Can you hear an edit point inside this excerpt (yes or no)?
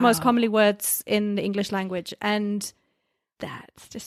no